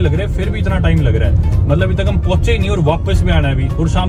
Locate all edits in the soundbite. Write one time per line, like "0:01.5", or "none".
none